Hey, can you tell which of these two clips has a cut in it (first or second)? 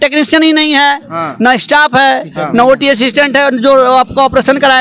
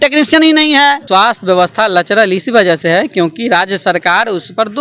second